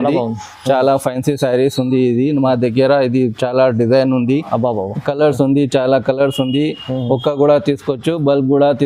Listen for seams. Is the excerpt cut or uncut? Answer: uncut